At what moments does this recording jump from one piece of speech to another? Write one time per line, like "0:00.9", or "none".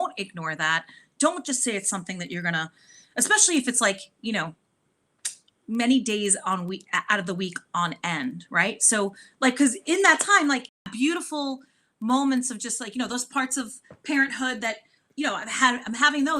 0:10.9